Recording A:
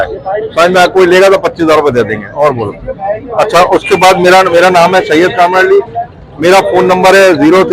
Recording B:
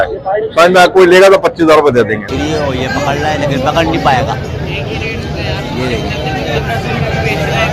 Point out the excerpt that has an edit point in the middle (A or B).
B